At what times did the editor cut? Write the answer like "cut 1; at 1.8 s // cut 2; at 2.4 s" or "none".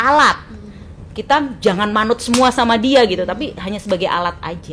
none